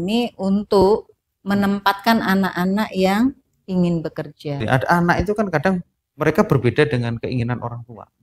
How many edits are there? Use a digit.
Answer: 1